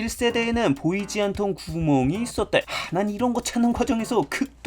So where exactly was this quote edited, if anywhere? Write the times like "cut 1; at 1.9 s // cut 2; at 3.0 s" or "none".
cut 1; at 2.6 s